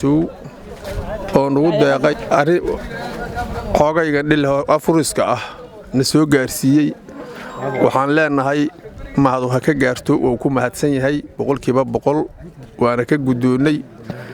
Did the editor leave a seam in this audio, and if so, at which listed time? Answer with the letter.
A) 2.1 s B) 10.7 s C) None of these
A